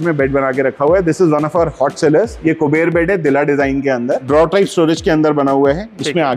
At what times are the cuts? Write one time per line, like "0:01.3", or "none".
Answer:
0:02.3
0:04.2